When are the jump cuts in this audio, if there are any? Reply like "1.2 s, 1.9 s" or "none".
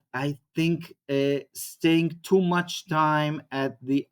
none